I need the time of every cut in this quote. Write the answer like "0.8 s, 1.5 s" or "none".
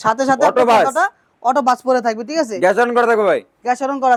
none